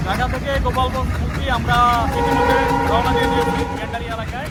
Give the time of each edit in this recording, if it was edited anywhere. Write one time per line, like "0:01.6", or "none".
none